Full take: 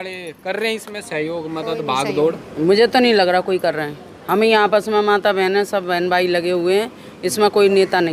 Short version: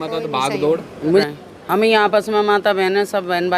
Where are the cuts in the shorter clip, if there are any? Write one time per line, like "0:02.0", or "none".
0:01.2